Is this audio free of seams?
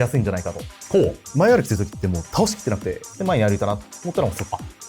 no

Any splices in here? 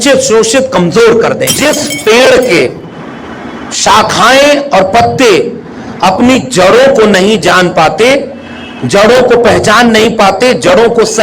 yes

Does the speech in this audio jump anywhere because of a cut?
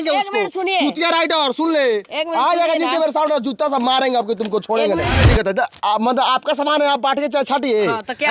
yes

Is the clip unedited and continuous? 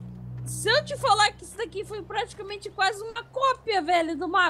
yes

